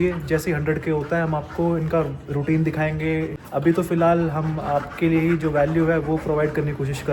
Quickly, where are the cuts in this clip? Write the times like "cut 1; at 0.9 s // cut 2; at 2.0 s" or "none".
none